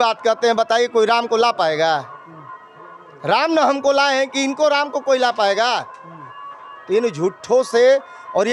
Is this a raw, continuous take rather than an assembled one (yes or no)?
yes